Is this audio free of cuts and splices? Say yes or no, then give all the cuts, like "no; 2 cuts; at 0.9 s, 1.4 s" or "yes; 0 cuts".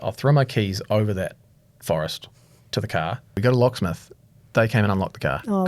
no; 1 cut; at 3.4 s